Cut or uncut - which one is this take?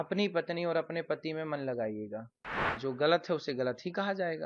cut